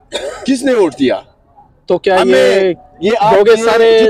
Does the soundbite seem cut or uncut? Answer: uncut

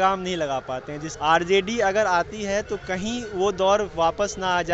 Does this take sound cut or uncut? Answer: cut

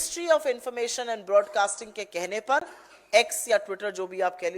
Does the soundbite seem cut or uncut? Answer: uncut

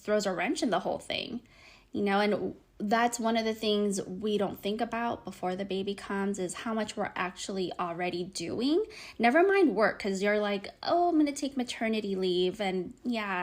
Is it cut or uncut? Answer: uncut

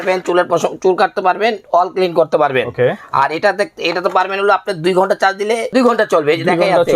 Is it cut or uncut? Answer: cut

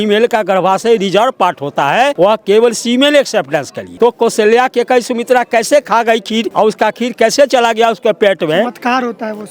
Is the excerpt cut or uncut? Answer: cut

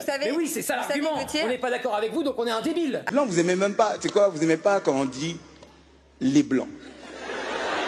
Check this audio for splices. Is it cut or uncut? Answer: cut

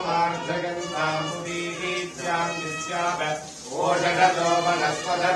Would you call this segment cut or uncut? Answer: uncut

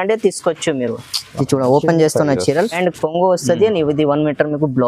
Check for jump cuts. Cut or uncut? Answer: cut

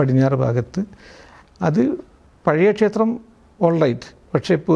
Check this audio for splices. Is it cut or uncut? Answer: uncut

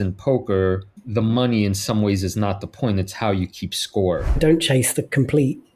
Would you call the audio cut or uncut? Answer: cut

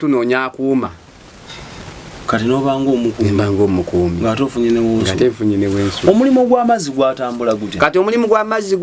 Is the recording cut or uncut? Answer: uncut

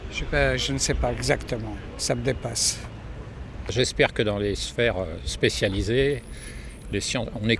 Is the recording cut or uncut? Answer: cut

